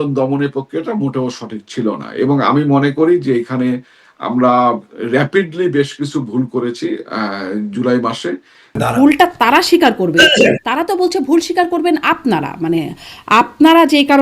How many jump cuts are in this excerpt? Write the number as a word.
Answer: one